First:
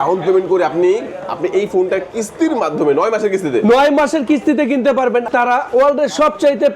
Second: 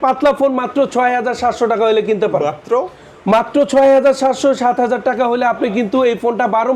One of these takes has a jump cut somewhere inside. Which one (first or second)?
first